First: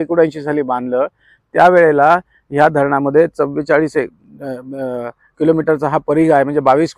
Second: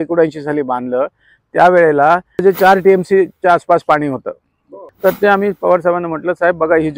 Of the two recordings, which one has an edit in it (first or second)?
second